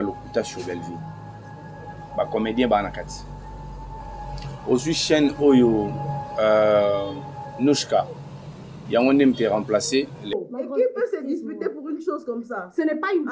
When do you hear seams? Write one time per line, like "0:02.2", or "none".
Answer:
0:10.2